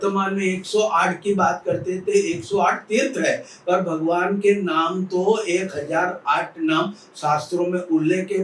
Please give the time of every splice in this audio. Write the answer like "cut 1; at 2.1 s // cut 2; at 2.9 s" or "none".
none